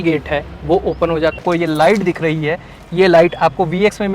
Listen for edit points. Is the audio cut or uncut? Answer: cut